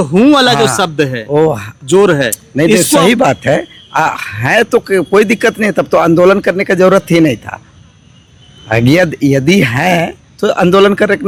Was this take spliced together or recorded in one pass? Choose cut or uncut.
uncut